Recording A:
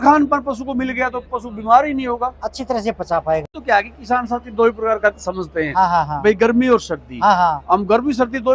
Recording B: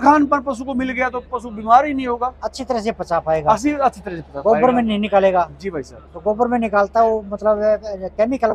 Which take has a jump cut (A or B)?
A